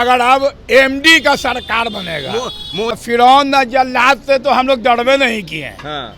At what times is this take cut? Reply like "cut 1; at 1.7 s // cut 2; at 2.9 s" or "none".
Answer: cut 1; at 2.9 s